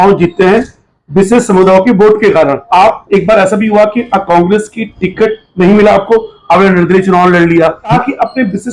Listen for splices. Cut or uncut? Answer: cut